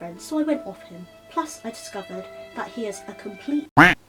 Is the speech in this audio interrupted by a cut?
no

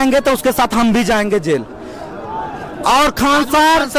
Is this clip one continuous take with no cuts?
yes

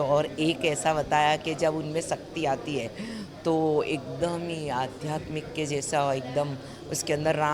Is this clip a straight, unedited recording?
yes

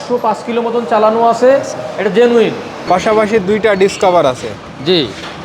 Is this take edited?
yes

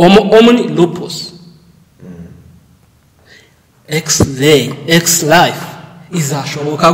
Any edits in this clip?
no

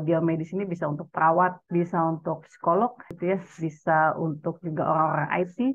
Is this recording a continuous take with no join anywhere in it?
no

